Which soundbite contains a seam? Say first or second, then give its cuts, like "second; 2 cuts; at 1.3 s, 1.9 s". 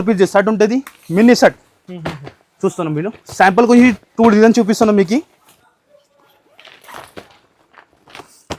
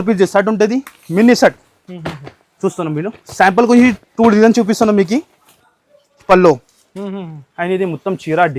second; 1 cut; at 6.2 s